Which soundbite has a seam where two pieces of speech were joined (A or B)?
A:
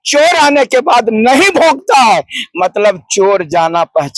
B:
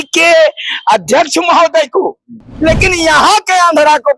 B